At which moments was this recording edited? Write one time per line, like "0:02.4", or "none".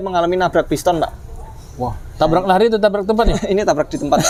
none